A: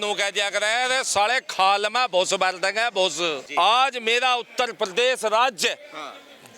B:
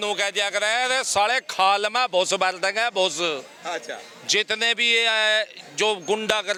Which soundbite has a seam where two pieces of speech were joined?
A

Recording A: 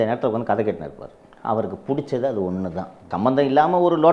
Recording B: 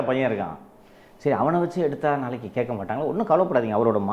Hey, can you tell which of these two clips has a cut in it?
A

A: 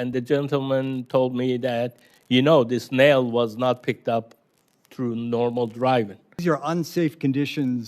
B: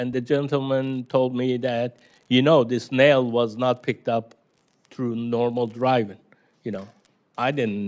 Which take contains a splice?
A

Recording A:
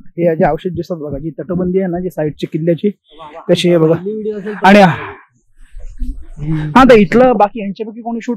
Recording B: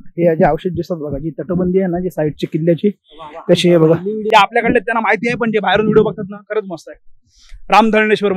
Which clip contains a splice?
B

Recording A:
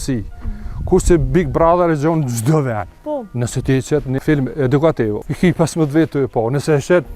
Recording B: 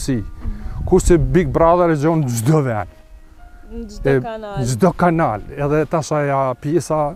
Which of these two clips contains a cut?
A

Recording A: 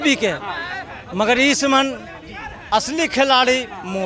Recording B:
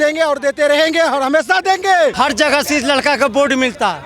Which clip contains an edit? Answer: B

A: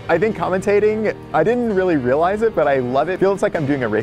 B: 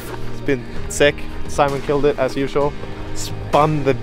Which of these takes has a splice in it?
A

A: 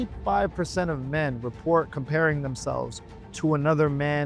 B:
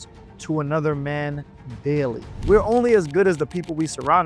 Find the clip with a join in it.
B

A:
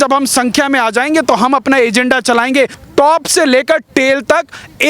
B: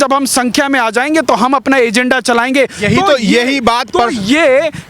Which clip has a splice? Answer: A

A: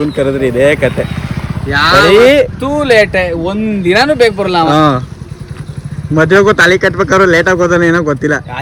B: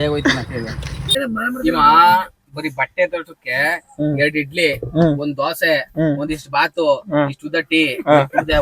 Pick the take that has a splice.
B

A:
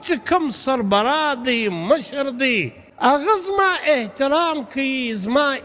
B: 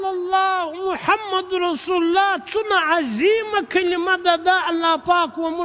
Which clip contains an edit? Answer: A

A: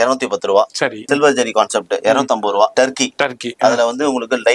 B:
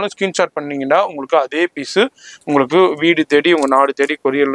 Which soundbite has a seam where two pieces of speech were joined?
A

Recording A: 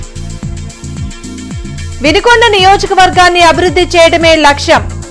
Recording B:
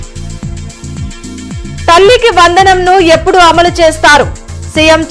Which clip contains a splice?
A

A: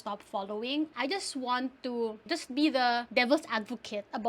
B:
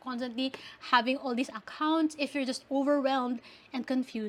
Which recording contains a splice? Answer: A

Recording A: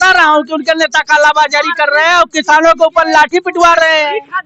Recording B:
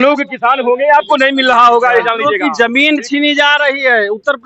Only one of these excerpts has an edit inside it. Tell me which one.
B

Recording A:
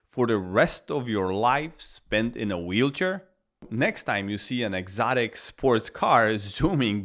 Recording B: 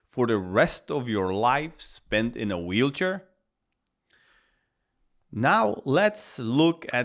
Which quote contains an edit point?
A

